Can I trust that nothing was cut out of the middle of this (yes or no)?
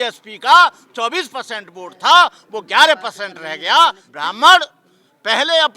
no